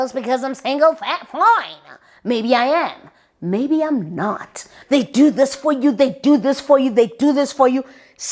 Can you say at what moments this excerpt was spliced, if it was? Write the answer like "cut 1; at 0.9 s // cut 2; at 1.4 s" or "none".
cut 1; at 4.7 s